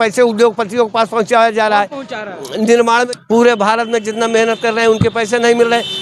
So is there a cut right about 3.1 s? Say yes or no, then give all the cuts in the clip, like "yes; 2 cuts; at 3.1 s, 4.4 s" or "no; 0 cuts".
yes; 1 cut; at 3.1 s